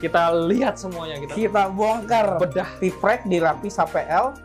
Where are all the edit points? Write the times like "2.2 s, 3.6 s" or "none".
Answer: 2.7 s